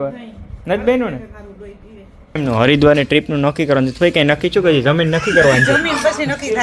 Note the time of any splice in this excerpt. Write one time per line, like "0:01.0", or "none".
0:02.4